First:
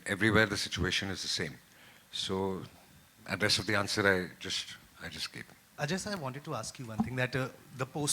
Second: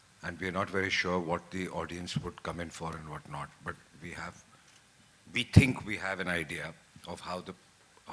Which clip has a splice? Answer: first; 1 cut; at 5.8 s

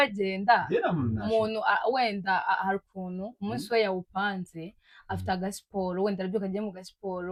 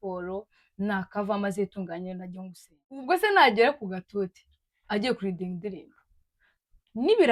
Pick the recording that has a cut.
second; 1 cut; at 3.0 s

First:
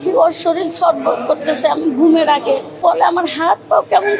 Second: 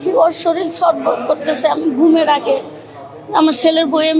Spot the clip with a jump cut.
first; 1 cut; at 2.8 s

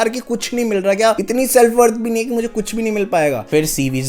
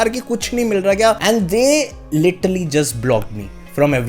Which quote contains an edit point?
second; 1 cut; at 1.2 s

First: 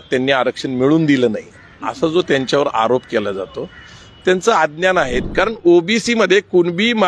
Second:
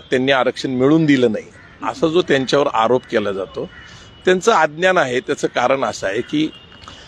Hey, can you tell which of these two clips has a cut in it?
first; 1 cut; at 5.2 s

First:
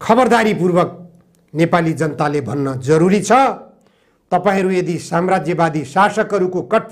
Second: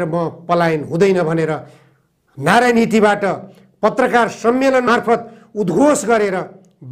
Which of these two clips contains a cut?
second; 1 cut; at 4.9 s

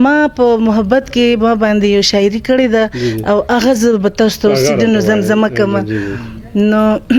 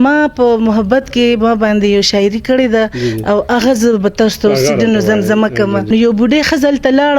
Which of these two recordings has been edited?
second; 1 cut; at 5.8 s

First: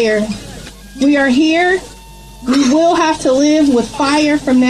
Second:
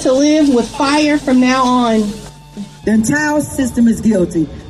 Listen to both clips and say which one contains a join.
second; 1 cut; at 2.7 s

